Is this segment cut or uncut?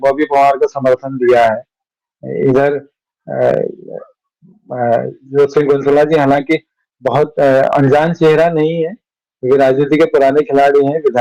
uncut